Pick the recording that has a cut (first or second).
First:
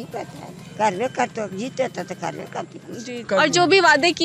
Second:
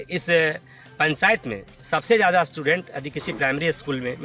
first